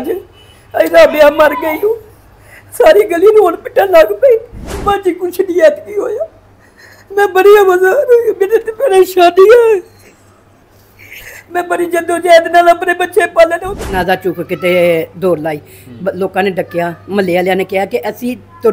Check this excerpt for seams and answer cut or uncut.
cut